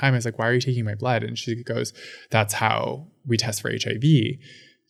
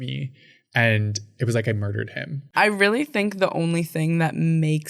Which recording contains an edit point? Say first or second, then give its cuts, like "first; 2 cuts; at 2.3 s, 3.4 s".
second; 1 cut; at 2.5 s